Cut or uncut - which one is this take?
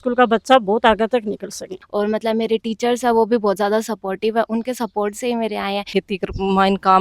cut